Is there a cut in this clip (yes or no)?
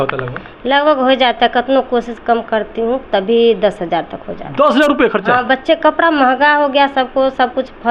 no